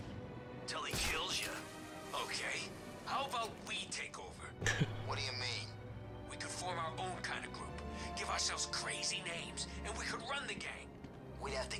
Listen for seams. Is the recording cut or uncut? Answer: uncut